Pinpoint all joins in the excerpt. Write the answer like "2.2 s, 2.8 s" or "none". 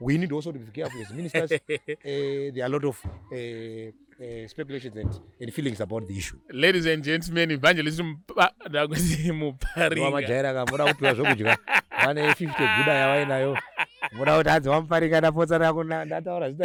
none

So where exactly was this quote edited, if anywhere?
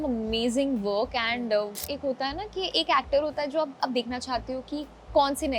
1.8 s

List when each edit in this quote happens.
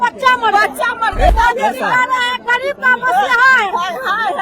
1.3 s

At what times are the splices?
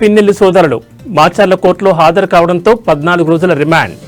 none

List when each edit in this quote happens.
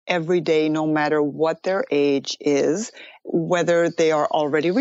none

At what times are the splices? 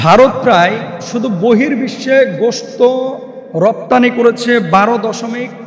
none

